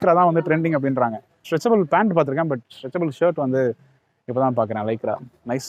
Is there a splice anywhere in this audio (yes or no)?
yes